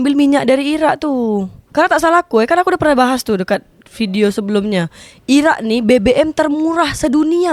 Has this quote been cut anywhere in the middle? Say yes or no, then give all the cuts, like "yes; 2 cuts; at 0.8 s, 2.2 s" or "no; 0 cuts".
no; 0 cuts